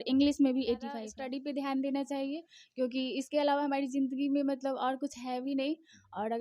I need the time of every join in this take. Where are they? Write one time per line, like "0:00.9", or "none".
0:01.1